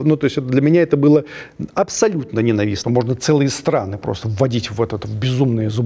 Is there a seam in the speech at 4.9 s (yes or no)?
no